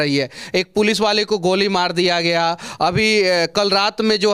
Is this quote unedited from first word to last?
yes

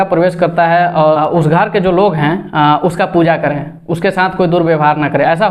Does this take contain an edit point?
yes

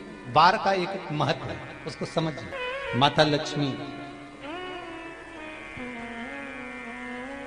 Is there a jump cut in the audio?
yes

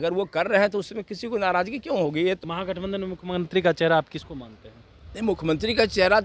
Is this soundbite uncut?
no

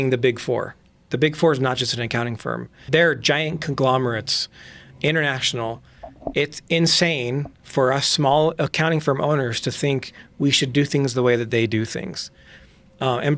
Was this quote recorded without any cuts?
no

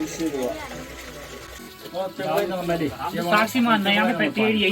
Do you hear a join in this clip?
yes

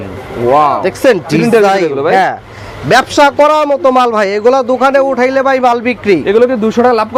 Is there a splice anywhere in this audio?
no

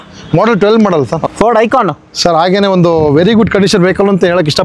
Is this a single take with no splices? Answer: yes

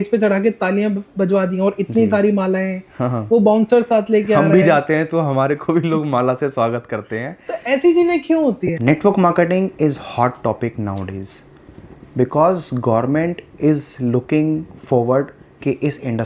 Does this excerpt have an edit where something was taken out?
yes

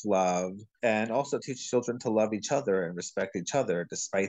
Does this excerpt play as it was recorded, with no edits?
yes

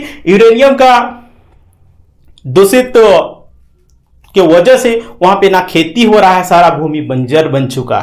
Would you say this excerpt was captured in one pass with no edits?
yes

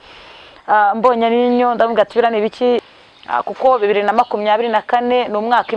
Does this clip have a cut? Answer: yes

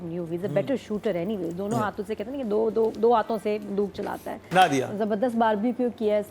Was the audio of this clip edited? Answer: yes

